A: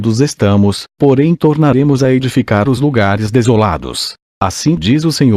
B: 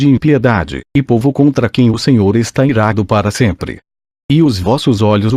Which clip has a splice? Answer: A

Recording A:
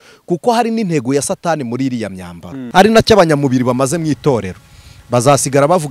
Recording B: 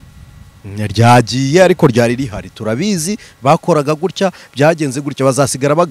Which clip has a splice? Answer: A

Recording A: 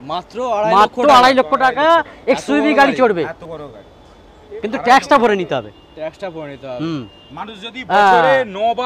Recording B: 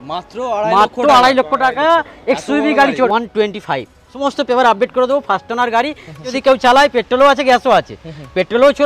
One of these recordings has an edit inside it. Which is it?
B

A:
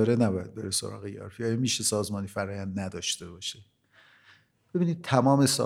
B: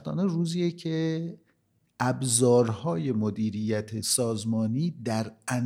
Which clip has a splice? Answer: B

